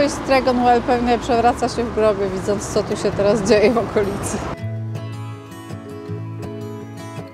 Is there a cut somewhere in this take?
no; 0 cuts

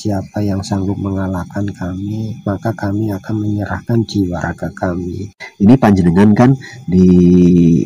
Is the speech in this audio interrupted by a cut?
yes; 1 cut; at 5.4 s

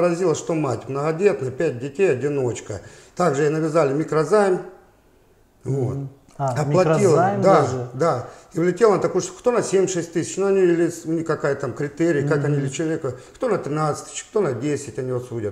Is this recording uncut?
yes; 0 cuts

